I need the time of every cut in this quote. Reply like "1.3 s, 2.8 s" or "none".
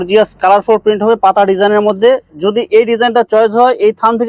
none